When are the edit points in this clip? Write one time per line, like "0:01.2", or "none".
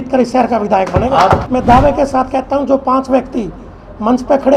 0:01.5